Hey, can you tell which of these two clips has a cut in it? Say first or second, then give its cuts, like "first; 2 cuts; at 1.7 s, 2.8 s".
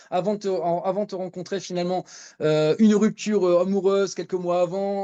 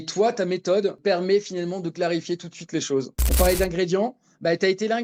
second; 2 cuts; at 1.0 s, 3.2 s